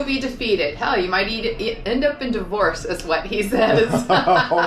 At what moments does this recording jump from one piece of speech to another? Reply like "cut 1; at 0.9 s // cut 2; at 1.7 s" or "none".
none